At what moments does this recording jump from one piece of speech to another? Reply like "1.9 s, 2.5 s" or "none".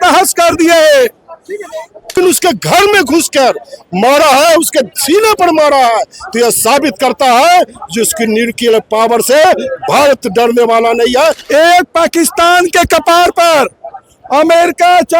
2.1 s, 11.4 s